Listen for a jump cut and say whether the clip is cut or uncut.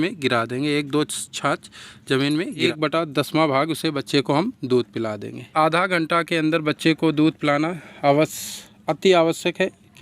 cut